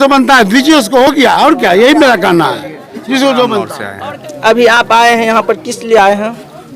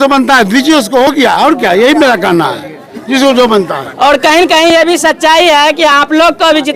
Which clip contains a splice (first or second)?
first